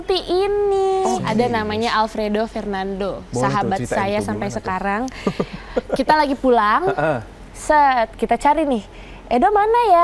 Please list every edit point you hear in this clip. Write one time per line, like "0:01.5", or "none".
0:01.2